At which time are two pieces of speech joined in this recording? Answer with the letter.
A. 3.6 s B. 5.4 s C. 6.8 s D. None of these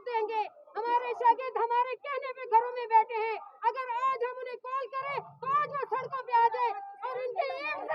D